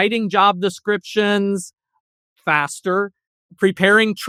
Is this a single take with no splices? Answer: yes; 0 cuts

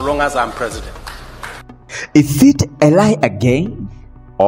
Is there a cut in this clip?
yes; 1 cut; at 1.3 s

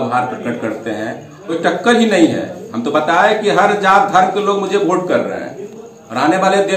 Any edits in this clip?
yes; 1 cut; at 1.5 s

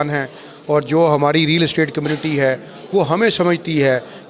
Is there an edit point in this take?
no; 0 cuts

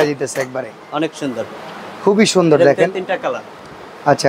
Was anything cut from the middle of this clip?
no; 0 cuts

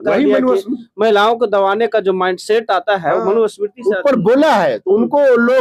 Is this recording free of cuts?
yes; 0 cuts

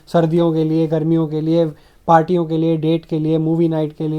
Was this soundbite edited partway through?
no; 0 cuts

